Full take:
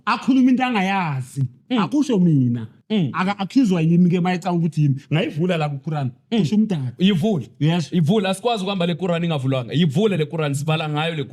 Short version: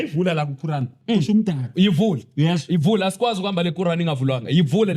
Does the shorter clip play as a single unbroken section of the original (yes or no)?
yes